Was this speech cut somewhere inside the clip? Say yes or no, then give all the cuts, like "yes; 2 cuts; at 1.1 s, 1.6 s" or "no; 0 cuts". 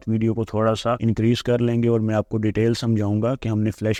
no; 0 cuts